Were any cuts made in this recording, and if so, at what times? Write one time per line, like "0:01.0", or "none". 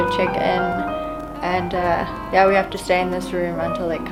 none